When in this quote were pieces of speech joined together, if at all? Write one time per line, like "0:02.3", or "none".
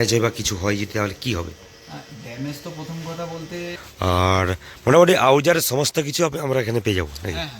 0:03.8